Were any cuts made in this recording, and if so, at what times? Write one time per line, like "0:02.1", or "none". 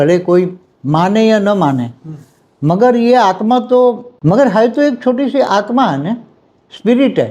0:04.1